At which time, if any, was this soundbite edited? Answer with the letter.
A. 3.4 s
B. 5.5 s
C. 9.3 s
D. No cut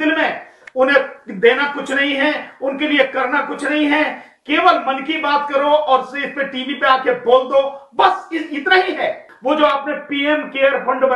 C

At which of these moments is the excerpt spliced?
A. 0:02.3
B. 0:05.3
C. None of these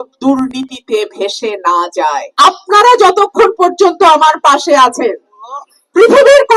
A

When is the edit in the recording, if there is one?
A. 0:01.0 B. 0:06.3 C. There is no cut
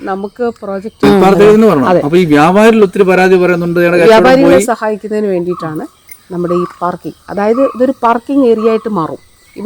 A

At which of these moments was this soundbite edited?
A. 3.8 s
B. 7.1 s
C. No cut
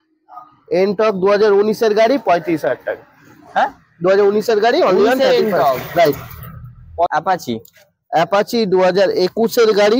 B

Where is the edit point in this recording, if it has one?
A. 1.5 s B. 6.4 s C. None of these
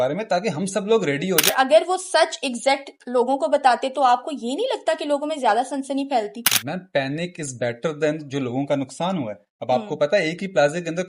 A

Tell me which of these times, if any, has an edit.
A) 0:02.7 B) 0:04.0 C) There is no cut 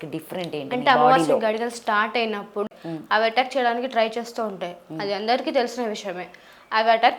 A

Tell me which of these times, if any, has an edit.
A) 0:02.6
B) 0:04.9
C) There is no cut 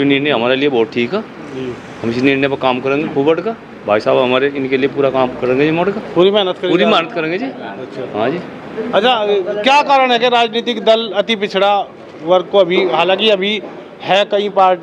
C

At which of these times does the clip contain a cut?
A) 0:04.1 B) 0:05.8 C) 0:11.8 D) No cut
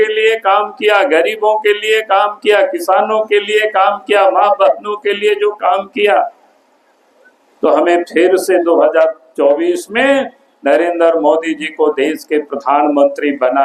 D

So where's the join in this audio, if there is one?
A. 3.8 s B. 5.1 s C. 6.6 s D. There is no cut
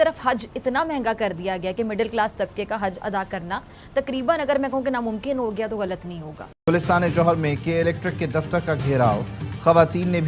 C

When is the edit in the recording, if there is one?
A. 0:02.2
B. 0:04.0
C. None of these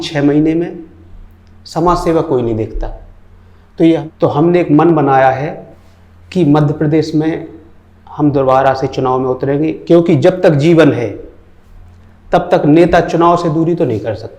B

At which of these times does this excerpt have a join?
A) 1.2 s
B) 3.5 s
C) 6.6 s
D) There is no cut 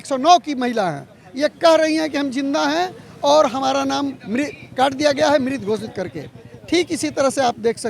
D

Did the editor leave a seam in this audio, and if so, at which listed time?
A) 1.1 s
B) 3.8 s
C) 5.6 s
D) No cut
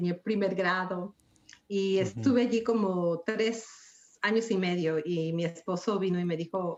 D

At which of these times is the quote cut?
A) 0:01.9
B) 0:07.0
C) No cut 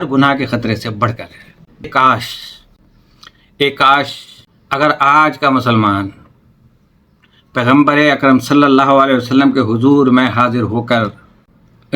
A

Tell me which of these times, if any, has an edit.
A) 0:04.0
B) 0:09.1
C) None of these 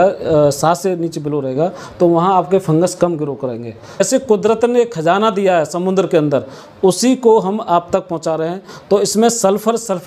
A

